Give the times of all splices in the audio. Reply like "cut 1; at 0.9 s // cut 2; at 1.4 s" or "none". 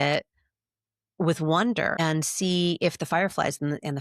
cut 1; at 2.0 s